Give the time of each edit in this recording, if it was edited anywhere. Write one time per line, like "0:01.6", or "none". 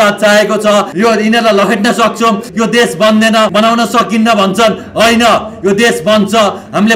0:00.9
0:02.5
0:03.5